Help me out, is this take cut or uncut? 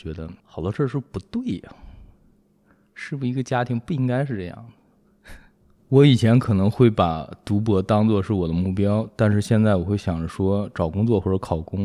uncut